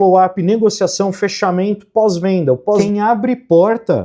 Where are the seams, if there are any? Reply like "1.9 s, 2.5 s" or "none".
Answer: 2.8 s